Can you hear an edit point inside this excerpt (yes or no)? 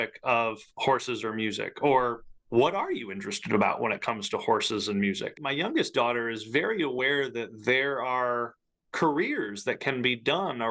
yes